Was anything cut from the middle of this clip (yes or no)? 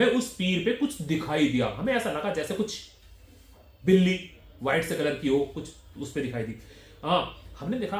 no